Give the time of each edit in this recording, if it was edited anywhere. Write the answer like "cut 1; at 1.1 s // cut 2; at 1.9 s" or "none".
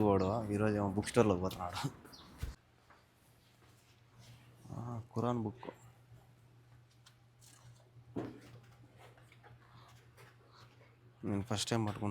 cut 1; at 2.6 s